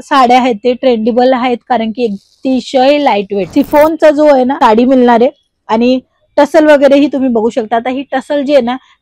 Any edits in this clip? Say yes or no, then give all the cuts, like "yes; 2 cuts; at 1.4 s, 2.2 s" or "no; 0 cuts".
yes; 1 cut; at 3.4 s